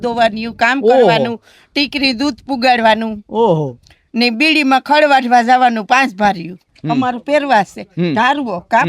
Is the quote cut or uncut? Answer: cut